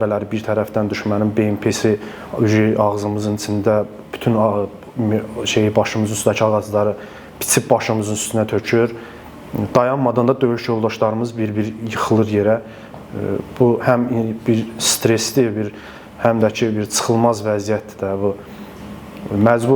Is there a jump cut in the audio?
no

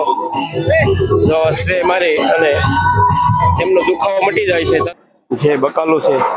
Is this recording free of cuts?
no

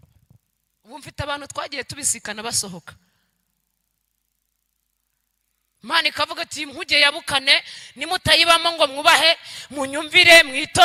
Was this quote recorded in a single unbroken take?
yes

